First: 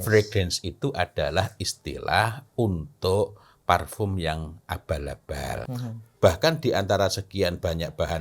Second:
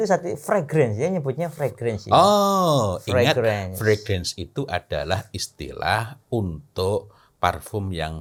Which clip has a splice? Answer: first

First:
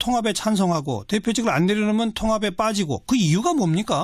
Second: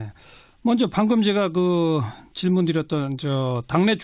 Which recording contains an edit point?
second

